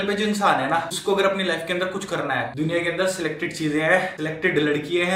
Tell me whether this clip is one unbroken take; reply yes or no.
no